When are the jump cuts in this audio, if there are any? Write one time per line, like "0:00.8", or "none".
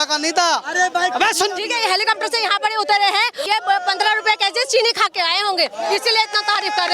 0:01.6
0:03.4